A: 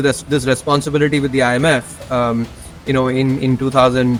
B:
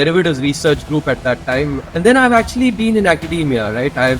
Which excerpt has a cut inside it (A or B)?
B